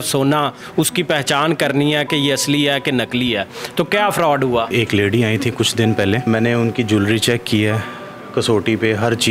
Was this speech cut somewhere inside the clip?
yes; 2 cuts; at 4.7 s, 6.3 s

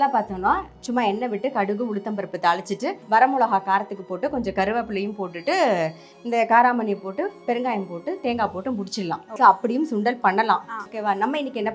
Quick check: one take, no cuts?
no; 3 cuts; at 3.0 s, 9.3 s, 10.8 s

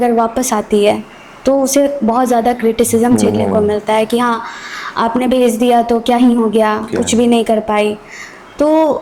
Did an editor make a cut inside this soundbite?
no; 0 cuts

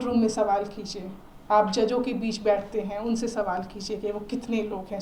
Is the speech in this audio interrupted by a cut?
no; 0 cuts

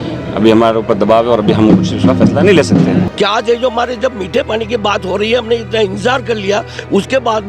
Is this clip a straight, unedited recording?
no; 1 cut; at 3.1 s

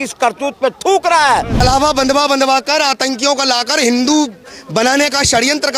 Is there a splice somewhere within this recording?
yes; 1 cut; at 1.5 s

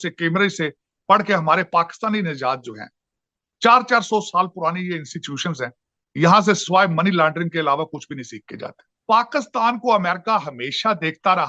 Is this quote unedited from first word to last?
no; 1 cut; at 8.9 s

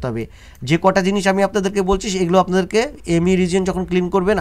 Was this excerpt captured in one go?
yes; 0 cuts

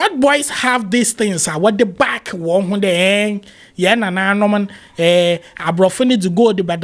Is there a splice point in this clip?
no; 0 cuts

